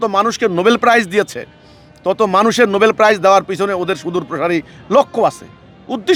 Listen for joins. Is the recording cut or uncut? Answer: uncut